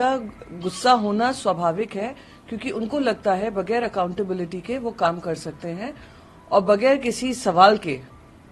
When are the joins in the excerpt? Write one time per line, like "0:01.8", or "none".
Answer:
none